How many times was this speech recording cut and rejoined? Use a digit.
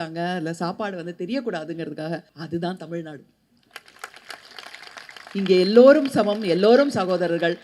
1